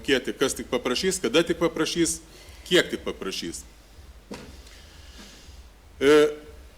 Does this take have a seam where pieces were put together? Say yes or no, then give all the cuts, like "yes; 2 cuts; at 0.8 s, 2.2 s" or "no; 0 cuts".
no; 0 cuts